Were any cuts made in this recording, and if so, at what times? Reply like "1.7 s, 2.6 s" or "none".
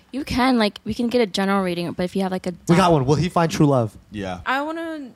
0.8 s, 2.6 s, 4.4 s